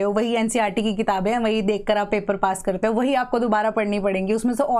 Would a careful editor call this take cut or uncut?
uncut